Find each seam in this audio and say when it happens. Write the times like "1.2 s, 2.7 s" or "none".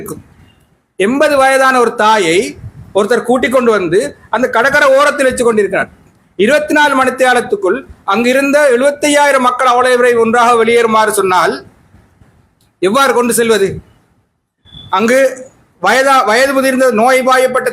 none